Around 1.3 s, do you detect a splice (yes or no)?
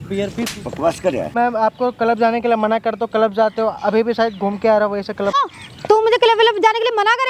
yes